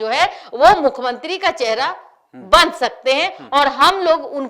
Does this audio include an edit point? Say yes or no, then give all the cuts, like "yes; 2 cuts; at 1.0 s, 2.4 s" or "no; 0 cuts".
no; 0 cuts